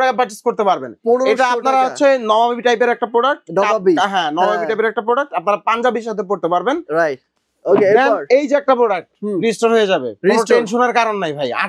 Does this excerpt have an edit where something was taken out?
no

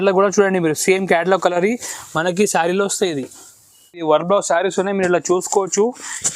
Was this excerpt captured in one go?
no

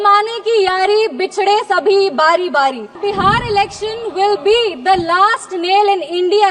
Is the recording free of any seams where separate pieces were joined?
no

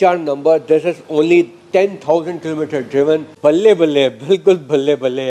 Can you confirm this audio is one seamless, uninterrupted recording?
no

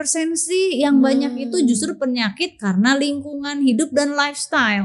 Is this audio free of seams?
yes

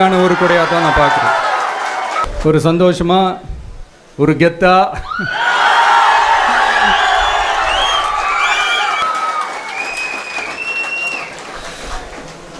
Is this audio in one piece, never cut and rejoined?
no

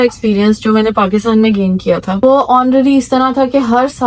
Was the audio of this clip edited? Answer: yes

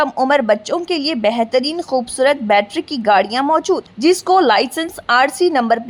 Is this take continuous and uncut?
yes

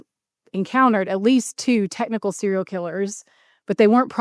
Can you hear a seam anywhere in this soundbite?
no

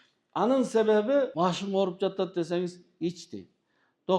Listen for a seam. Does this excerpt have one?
yes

